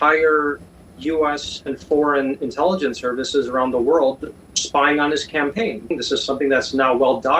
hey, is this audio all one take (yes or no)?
no